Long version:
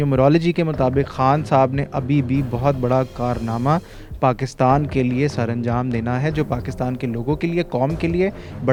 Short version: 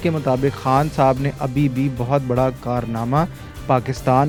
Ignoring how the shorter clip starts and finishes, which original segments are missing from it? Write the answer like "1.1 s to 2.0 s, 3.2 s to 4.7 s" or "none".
none